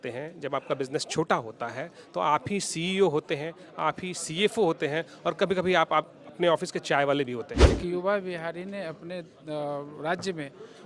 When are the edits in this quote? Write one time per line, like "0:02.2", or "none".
0:07.6